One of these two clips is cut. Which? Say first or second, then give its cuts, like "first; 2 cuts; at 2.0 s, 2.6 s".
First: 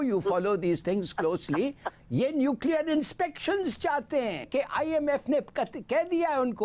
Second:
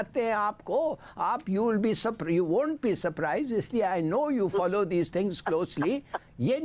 first; 1 cut; at 4.4 s